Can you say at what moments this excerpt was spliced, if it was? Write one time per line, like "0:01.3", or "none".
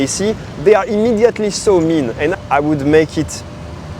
0:02.3